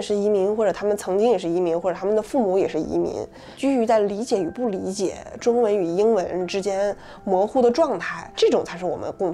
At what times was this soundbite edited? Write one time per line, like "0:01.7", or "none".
none